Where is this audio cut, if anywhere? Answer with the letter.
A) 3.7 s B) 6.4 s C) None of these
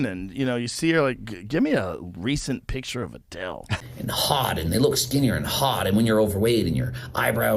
A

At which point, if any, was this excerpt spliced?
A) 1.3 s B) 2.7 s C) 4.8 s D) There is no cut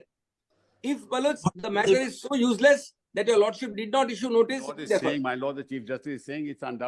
C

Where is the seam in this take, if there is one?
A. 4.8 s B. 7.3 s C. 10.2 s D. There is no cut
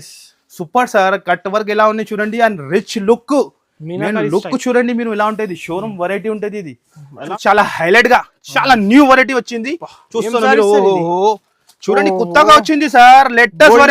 B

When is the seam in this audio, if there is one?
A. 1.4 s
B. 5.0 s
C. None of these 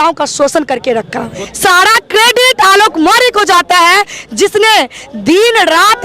A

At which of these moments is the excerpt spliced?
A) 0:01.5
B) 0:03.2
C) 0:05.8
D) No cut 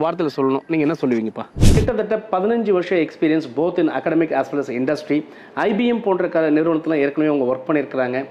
A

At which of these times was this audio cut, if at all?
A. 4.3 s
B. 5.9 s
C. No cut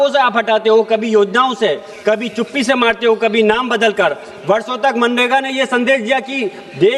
C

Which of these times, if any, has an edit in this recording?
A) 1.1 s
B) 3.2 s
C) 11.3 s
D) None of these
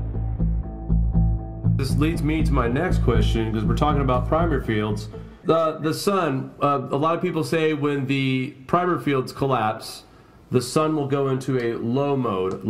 A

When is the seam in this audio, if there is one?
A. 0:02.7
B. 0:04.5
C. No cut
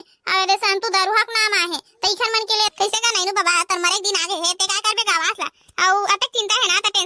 A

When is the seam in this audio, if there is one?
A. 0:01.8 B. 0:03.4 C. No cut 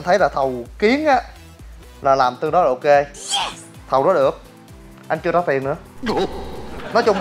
B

